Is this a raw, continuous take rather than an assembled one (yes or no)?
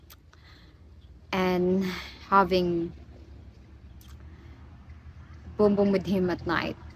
yes